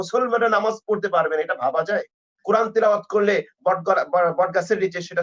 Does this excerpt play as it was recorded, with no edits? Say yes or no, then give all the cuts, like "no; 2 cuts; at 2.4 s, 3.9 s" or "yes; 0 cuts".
no; 1 cut; at 2.3 s